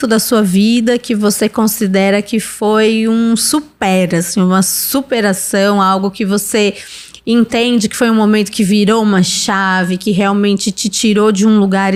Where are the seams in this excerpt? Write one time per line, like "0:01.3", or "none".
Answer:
none